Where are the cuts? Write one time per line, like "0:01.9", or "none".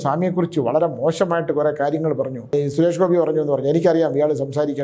0:02.5